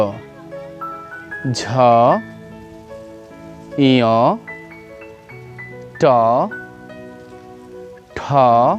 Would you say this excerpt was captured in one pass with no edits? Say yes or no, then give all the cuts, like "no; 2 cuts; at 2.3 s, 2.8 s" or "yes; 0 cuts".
yes; 0 cuts